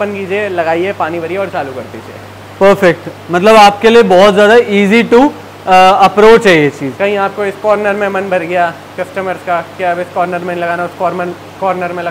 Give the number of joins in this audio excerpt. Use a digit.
0